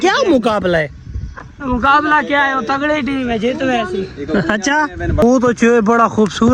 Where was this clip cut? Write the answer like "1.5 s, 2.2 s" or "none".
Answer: 5.2 s